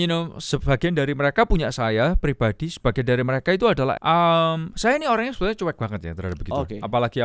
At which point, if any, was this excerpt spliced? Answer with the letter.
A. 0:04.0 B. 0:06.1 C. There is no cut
A